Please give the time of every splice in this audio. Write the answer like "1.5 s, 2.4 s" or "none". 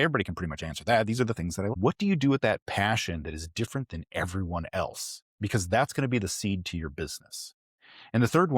1.7 s